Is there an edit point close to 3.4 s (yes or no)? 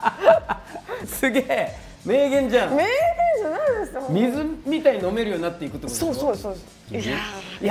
no